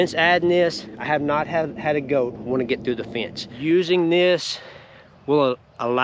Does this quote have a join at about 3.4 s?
yes; 1 cut; at 3.4 s

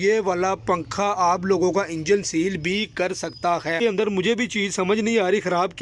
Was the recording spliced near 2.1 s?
no; 1 cut; at 3.8 s

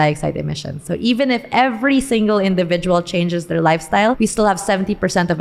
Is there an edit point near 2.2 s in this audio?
no; 1 cut; at 4.2 s

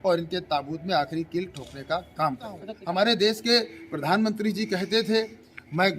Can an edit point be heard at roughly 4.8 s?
no; 1 cut; at 2.7 s

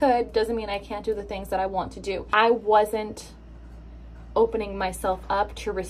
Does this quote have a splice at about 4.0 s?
no; 1 cut; at 2.3 s

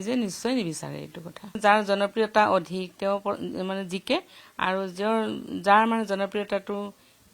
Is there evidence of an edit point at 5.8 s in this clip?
no; 1 cut; at 1.6 s

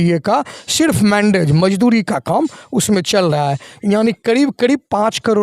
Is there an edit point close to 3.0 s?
no; 0 cuts

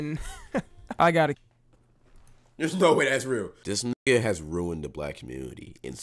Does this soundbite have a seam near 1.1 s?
no; 1 cut; at 3.6 s

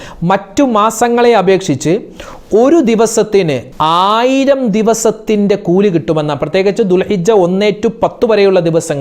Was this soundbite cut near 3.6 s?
yes; 1 cut; at 3.6 s

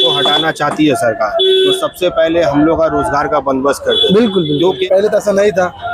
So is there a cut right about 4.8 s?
yes; 1 cut; at 4.8 s

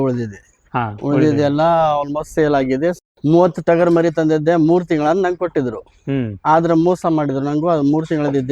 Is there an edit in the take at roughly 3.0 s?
yes; 1 cut; at 3.0 s

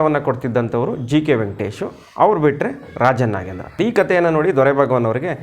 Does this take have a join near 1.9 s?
no; 1 cut; at 3.6 s

